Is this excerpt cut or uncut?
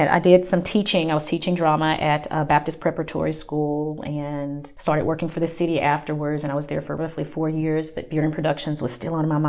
cut